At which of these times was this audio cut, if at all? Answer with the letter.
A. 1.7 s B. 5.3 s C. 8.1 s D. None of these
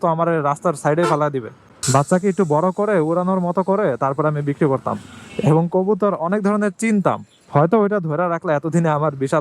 A